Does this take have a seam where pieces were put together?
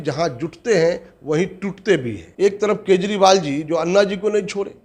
yes; 1 cut; at 2.2 s

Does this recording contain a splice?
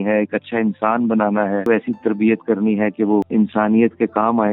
yes; 2 cuts; at 1.6 s, 3.3 s

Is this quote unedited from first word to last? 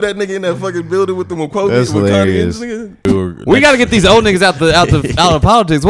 no; 1 cut; at 3.1 s

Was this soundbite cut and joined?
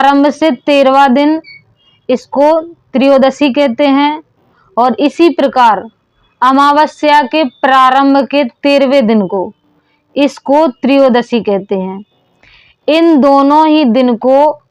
no; 0 cuts

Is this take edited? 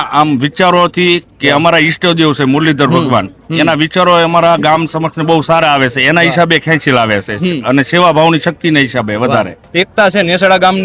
yes; 1 cut; at 9.6 s

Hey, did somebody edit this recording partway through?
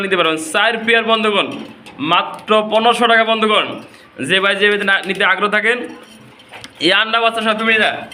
no; 0 cuts

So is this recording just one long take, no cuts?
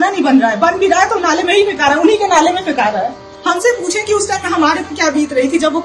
no; 1 cut; at 3.3 s

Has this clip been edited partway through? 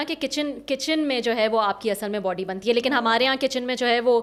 no; 0 cuts

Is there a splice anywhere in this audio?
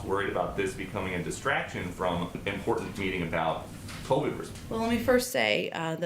yes; 2 cuts; at 2.4 s, 4.5 s

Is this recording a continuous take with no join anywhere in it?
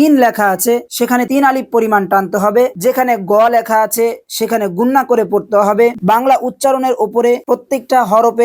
no; 2 cuts; at 2.7 s, 6.0 s

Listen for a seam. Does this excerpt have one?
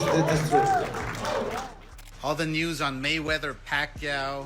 yes; 1 cut; at 1.9 s

